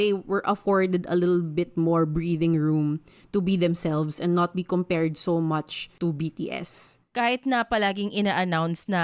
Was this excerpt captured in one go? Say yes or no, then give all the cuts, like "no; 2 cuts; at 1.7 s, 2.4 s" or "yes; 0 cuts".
no; 2 cuts; at 5.8 s, 7.0 s